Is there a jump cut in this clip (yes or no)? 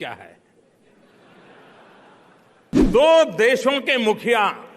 yes